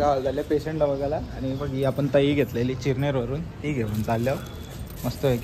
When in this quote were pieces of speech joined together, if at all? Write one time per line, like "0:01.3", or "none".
none